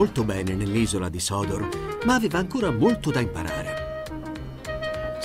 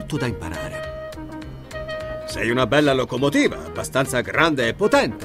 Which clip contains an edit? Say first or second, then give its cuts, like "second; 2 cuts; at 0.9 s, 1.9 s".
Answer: second; 1 cut; at 3.3 s